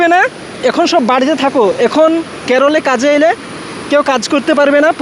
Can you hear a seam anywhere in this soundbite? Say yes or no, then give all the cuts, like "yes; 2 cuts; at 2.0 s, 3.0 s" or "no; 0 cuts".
no; 0 cuts